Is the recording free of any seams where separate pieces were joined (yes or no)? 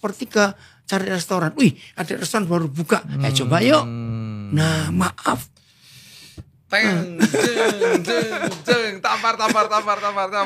yes